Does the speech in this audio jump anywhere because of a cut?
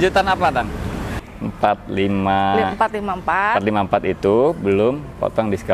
yes; 1 cut; at 1.2 s

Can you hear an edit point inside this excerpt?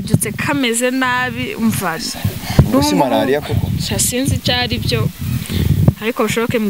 no; 0 cuts

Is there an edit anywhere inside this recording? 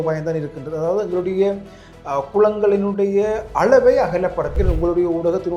yes; 1 cut; at 4.6 s

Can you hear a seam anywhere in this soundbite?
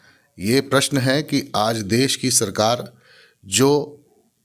no; 0 cuts

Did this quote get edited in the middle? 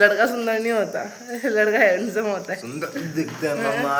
no; 0 cuts

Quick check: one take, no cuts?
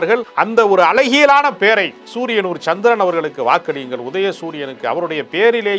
yes; 0 cuts

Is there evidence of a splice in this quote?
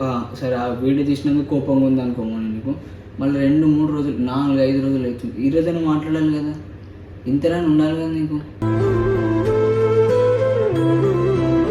no; 0 cuts

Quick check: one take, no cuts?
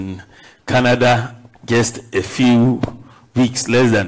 yes; 0 cuts

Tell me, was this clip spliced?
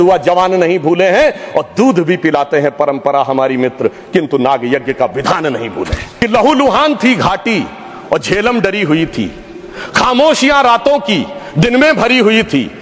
yes; 1 cut; at 6.0 s

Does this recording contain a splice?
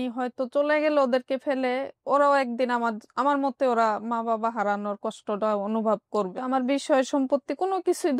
yes; 1 cut; at 6.3 s

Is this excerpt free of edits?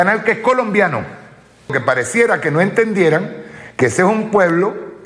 no; 1 cut; at 1.7 s

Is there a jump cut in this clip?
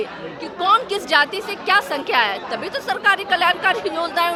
no; 0 cuts

